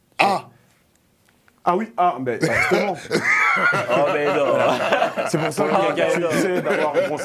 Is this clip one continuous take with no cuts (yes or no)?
yes